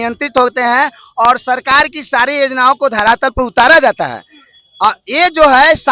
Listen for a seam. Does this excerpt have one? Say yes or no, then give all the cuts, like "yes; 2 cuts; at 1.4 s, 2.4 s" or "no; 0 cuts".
no; 0 cuts